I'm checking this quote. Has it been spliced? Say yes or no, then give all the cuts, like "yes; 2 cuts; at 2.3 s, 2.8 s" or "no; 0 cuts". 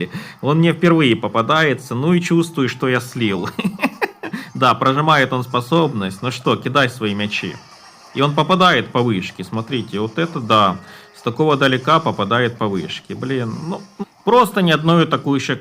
yes; 1 cut; at 13.9 s